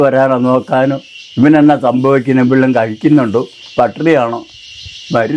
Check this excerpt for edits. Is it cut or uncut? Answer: uncut